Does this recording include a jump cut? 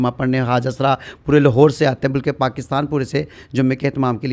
no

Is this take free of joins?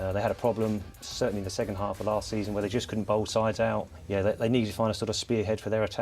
no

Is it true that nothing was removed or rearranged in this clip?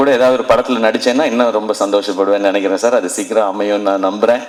yes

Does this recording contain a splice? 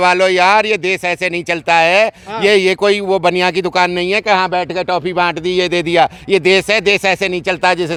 no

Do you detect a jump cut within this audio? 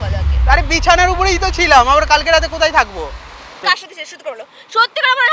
yes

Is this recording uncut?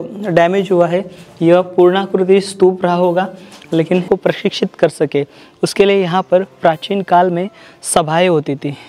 no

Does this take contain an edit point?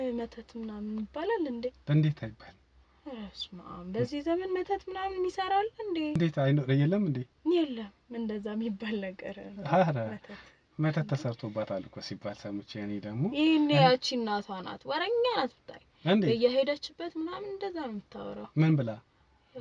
no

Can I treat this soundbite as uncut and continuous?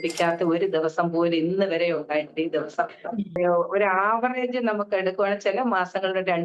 no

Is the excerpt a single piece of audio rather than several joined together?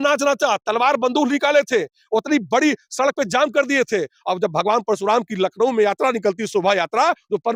yes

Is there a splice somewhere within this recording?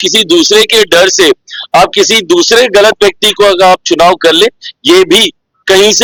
no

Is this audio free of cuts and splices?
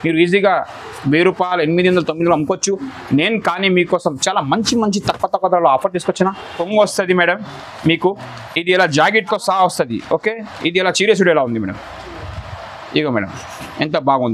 no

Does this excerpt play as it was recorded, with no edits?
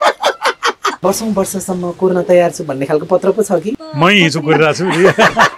no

